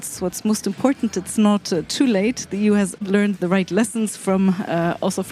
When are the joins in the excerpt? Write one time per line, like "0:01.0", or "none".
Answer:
0:03.0